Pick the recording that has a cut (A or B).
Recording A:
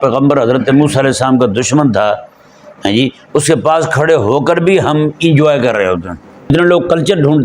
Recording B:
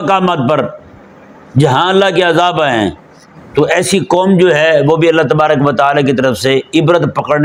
A